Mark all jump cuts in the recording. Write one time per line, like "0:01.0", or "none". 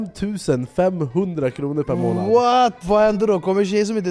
0:02.9